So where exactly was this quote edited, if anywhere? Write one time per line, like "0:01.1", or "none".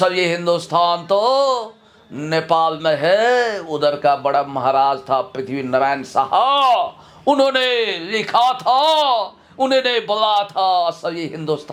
none